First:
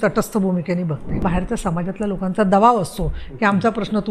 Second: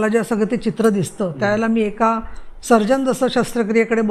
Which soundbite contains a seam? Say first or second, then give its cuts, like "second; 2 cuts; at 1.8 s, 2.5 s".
first; 1 cut; at 1.2 s